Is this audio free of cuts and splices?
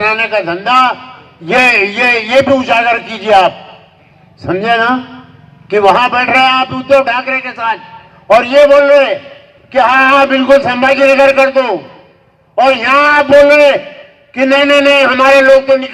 yes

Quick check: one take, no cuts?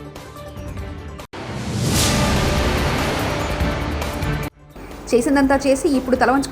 no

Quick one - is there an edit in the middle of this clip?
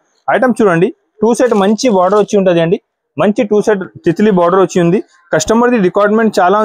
no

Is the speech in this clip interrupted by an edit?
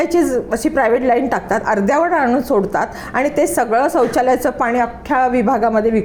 no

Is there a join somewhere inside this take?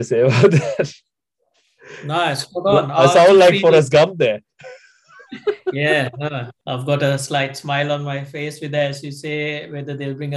yes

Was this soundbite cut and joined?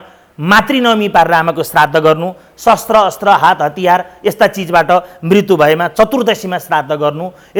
no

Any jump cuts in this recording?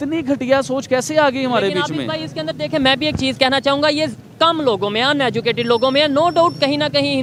no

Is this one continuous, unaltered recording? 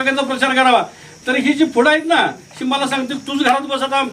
yes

